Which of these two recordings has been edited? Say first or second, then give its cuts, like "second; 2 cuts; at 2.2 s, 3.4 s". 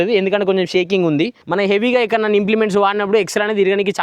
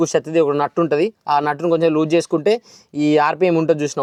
first; 1 cut; at 1.4 s